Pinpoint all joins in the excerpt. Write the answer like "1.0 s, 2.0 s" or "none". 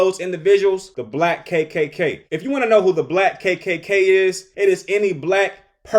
1.0 s, 2.3 s, 4.5 s